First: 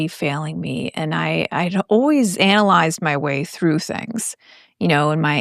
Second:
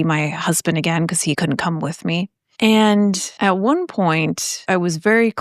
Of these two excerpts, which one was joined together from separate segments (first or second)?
second